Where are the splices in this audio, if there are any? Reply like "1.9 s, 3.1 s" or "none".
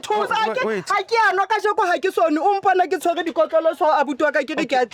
none